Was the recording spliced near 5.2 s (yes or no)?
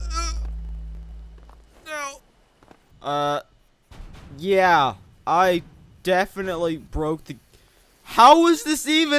no